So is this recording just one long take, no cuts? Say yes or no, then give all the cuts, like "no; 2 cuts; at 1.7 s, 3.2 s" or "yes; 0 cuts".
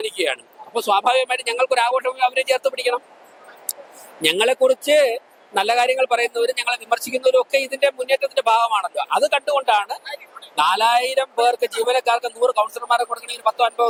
yes; 0 cuts